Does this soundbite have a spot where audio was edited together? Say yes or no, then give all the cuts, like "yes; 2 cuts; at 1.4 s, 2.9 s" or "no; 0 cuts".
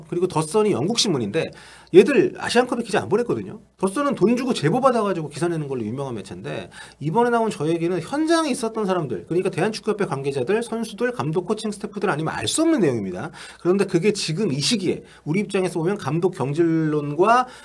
no; 0 cuts